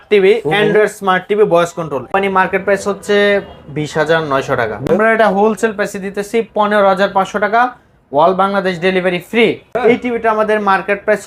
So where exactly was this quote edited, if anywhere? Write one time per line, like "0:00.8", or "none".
0:02.1
0:04.9
0:09.7

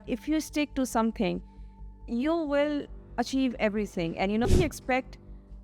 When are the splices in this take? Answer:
0:04.5

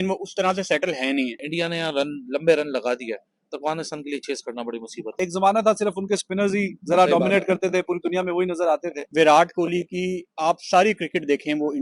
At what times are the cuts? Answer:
0:01.4
0:05.1
0:09.0

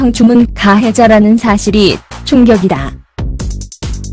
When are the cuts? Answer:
0:02.8

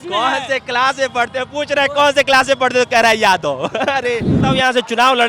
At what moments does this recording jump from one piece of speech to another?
0:04.3

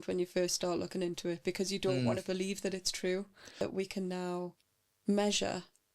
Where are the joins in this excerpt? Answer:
0:03.6

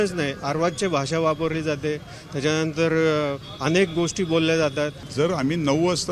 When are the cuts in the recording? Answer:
0:05.0

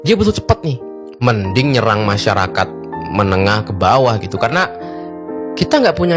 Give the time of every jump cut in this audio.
none

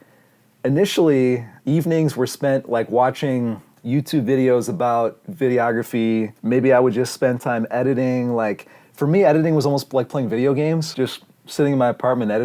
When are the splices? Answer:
0:01.5
0:03.7
0:06.3
0:10.9

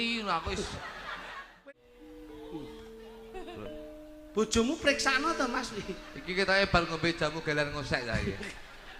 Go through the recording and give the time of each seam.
0:01.6

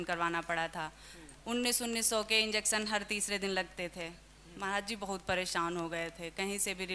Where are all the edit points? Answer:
none

